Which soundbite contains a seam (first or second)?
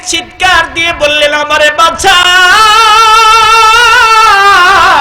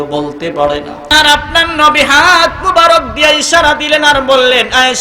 second